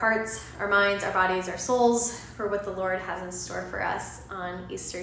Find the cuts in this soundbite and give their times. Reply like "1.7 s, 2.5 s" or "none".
none

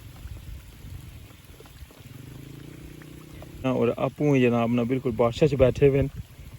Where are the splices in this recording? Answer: 3.6 s

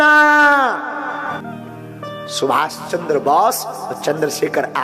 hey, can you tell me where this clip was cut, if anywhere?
1.4 s

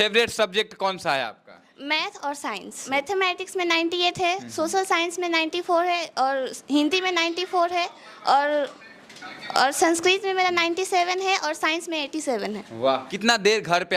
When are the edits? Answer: 2.8 s, 13.1 s

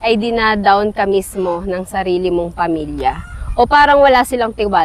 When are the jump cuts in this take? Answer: none

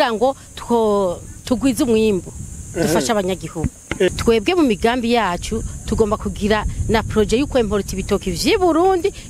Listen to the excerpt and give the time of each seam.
4.1 s

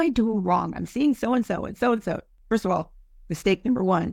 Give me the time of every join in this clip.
none

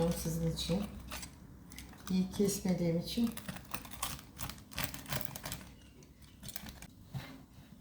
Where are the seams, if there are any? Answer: 6.9 s

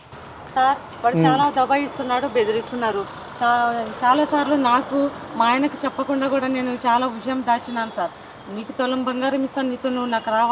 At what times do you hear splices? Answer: none

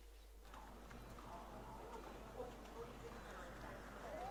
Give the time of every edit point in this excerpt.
none

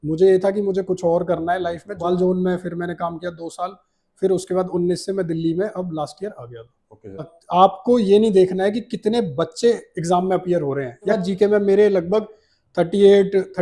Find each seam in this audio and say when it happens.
2.0 s, 7.4 s, 11.2 s

